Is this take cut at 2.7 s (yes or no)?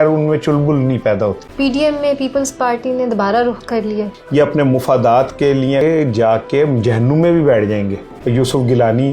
no